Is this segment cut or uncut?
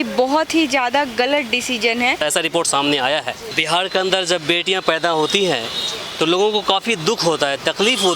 cut